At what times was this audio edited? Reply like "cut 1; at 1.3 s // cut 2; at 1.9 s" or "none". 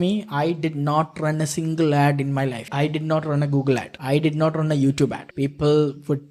cut 1; at 2.7 s // cut 2; at 3.9 s // cut 3; at 5.2 s